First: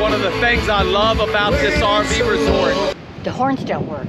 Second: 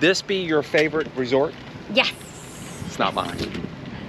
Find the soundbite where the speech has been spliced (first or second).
first